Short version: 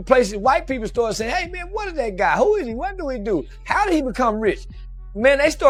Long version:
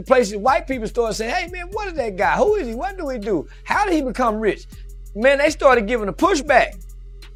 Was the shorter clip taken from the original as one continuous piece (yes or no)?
yes